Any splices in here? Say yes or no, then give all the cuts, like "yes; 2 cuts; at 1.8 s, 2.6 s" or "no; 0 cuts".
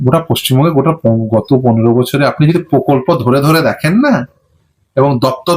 no; 0 cuts